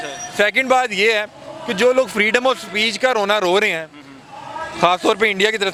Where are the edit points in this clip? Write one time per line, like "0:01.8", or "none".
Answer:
none